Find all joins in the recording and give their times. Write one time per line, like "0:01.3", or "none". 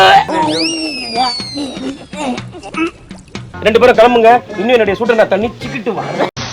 0:03.5

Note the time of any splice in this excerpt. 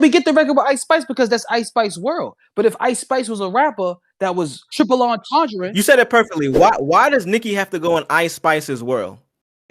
none

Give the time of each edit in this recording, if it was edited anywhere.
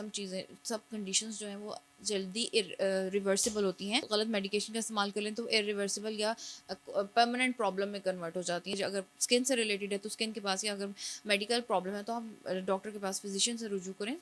0:04.1
0:08.8

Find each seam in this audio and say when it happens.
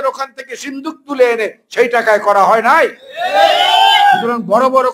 none

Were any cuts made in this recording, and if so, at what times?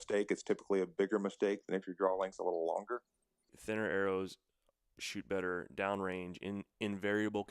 0:03.5

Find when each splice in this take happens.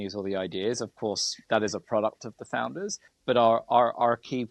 0:03.1

